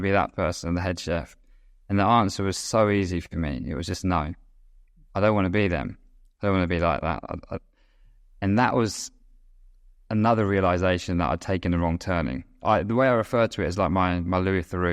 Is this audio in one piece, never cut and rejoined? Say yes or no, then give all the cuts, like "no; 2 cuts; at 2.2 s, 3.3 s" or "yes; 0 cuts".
yes; 0 cuts